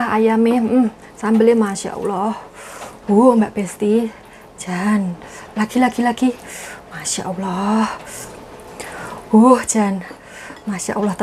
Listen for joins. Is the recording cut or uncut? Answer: uncut